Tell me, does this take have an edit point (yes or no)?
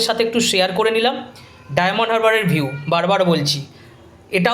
no